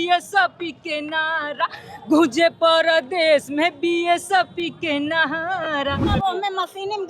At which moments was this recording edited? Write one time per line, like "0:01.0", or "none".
0:06.0

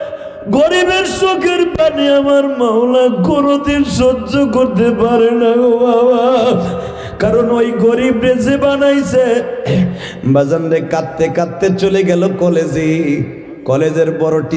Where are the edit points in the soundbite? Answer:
0:10.1

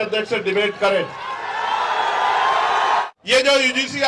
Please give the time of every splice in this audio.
0:03.0

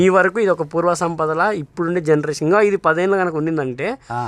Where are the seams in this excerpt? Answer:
none

